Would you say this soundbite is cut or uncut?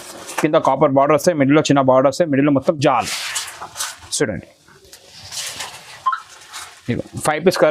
uncut